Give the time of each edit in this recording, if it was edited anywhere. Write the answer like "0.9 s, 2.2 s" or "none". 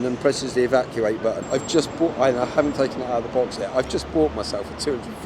1.4 s